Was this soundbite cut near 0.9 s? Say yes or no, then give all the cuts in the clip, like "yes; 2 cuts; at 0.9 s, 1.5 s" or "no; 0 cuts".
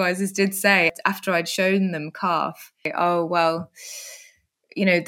yes; 2 cuts; at 0.9 s, 2.9 s